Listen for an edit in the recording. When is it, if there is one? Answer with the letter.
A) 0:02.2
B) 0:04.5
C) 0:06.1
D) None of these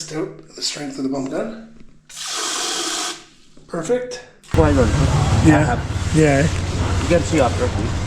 B